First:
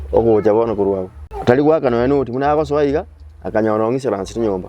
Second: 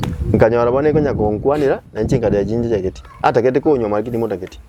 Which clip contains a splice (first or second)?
first